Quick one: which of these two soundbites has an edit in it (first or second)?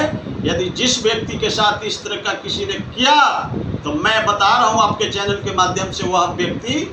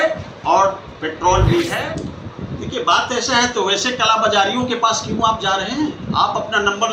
second